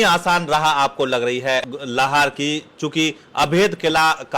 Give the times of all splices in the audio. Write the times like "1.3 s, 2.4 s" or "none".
1.7 s